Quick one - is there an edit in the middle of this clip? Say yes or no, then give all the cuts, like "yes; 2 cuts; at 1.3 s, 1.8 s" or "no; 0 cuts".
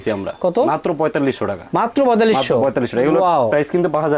no; 0 cuts